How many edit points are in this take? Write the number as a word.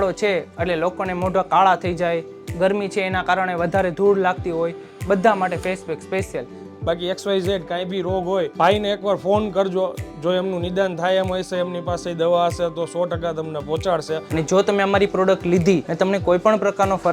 four